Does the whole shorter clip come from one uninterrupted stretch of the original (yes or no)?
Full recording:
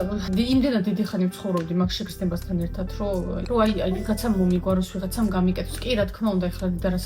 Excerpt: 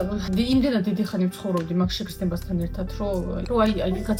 yes